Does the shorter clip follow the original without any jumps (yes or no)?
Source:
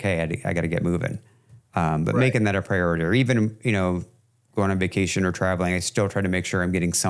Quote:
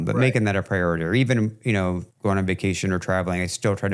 no